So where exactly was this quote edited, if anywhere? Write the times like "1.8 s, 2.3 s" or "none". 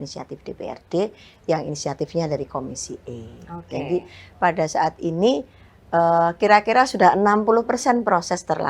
none